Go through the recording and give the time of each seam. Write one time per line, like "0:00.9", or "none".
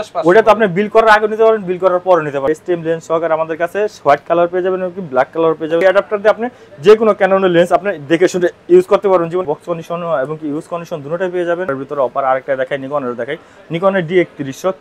0:02.5
0:05.8
0:09.5
0:11.7